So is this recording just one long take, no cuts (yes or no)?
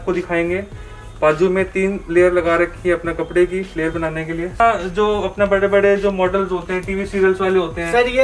no